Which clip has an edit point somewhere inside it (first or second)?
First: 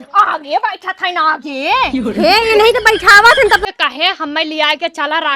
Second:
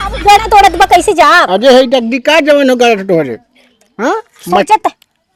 first